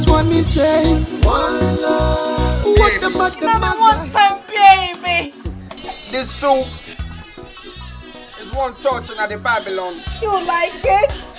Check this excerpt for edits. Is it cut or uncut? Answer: cut